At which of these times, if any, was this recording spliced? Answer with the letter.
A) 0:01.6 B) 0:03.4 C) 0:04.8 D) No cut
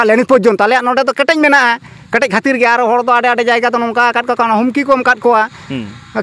D